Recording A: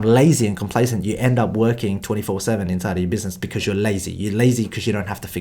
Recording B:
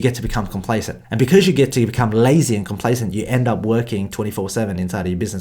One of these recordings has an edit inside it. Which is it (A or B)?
B